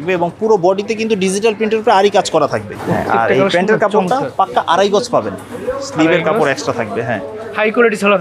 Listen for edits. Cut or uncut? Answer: uncut